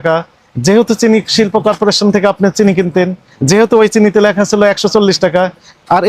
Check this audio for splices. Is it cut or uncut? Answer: uncut